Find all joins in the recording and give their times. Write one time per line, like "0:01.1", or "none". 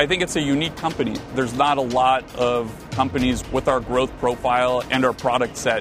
0:01.3
0:03.4
0:04.9